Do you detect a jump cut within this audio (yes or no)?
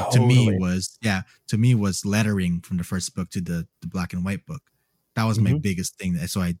no